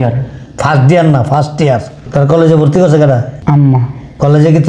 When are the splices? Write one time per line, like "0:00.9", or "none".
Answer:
0:02.0
0:03.3